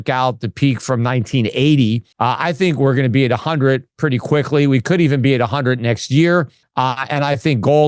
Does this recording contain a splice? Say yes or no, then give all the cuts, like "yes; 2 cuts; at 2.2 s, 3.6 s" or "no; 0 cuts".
yes; 2 cuts; at 2.1 s, 6.6 s